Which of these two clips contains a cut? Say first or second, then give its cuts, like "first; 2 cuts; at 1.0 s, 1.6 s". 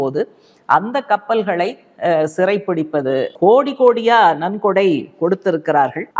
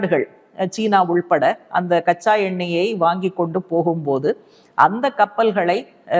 first; 1 cut; at 3.3 s